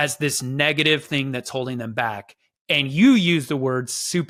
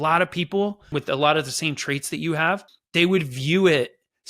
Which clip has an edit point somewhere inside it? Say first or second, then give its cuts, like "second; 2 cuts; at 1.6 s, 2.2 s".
second; 2 cuts; at 0.9 s, 2.8 s